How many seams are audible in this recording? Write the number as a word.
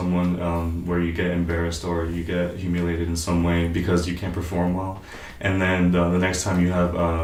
zero